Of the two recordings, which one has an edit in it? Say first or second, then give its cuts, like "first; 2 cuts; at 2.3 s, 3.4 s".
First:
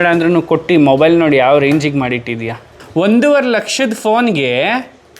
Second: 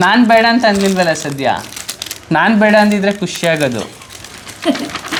first; 1 cut; at 2.7 s